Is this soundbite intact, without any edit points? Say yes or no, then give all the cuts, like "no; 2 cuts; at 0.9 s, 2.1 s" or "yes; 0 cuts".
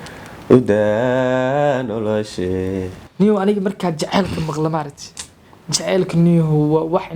no; 1 cut; at 3.0 s